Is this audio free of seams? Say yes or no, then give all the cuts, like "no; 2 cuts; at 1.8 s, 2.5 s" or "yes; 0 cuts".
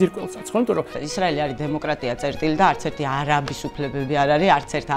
no; 1 cut; at 1.0 s